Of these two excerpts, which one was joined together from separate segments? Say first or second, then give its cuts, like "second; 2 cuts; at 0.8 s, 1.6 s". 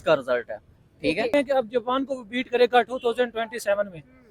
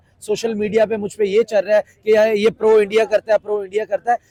first; 1 cut; at 1.3 s